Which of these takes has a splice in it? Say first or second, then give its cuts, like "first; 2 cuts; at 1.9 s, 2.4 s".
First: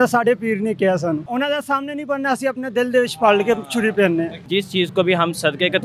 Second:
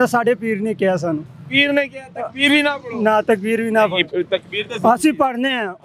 first; 2 cuts; at 1.3 s, 4.4 s